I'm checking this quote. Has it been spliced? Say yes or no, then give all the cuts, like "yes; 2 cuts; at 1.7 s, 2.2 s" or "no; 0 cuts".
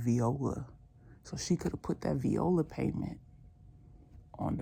no; 0 cuts